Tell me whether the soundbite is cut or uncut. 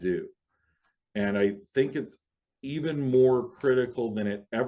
uncut